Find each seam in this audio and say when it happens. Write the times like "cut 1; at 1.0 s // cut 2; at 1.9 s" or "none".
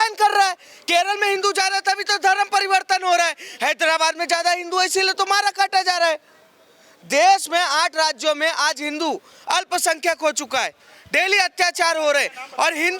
none